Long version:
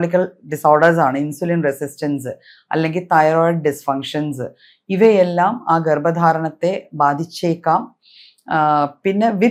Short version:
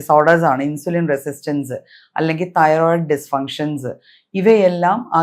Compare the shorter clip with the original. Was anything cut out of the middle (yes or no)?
no